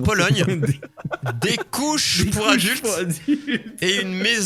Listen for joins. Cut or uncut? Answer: uncut